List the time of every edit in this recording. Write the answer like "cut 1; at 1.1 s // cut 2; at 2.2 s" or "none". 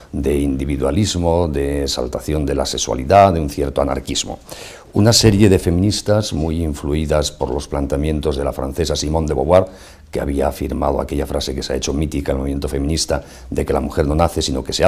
none